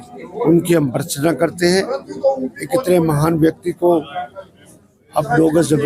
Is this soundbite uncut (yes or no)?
yes